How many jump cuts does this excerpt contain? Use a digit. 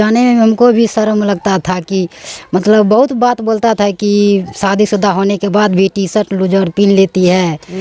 0